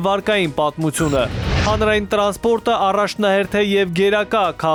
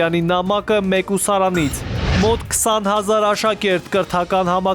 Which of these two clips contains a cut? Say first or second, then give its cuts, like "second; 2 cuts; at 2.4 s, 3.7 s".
second; 1 cut; at 2.1 s